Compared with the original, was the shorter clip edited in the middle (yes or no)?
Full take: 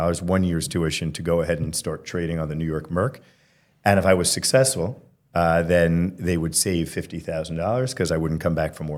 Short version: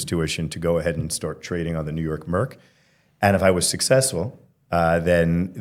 no